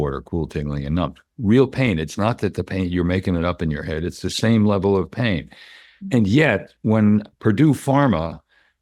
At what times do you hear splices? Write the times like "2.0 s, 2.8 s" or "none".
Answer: none